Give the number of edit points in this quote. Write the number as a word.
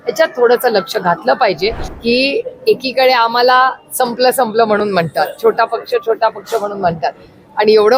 one